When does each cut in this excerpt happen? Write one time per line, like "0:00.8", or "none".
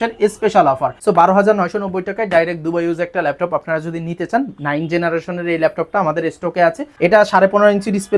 0:01.0
0:06.9